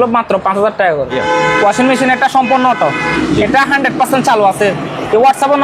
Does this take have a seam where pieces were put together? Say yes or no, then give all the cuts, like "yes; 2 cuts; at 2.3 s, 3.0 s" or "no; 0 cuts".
yes; 1 cut; at 1.2 s